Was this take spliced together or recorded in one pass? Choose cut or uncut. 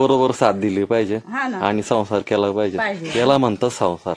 uncut